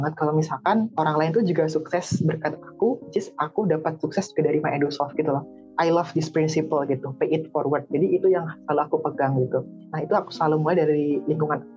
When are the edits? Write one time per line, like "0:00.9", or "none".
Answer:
0:00.9
0:05.6